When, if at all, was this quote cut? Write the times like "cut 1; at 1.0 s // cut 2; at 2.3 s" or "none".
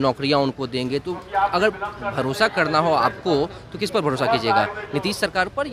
none